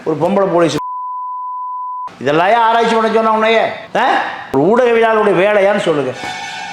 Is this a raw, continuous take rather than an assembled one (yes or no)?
yes